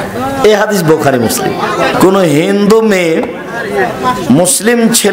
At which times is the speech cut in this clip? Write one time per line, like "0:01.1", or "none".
0:01.9